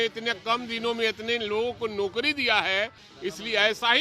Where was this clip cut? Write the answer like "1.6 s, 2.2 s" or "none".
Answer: 3.0 s